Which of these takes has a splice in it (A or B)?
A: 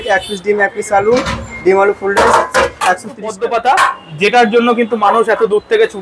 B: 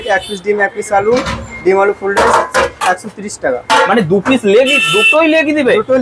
A